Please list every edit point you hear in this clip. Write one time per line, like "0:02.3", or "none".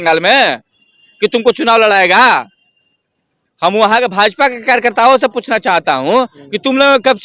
none

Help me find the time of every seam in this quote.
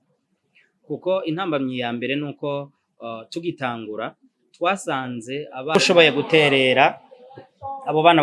0:05.8

